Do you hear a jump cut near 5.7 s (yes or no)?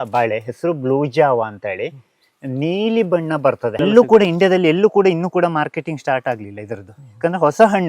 no